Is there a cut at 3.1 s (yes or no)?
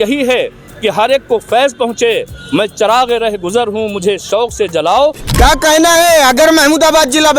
no